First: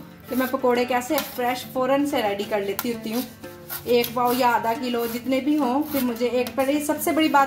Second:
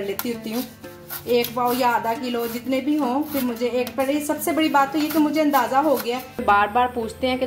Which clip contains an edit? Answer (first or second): second